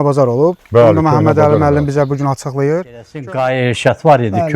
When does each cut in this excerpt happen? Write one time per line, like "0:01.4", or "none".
0:03.2